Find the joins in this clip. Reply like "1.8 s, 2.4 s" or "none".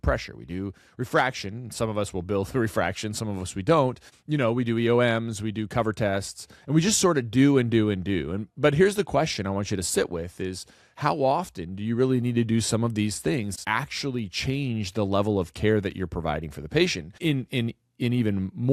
4.1 s, 13.5 s, 17.2 s